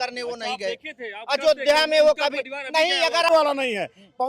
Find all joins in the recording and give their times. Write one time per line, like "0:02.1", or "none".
0:03.3